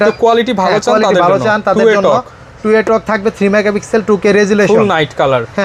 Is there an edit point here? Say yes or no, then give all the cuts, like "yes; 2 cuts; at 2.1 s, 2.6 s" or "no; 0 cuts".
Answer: no; 0 cuts